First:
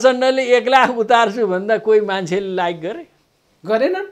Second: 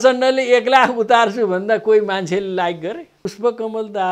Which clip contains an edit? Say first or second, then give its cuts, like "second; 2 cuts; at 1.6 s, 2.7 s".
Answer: second; 1 cut; at 3.2 s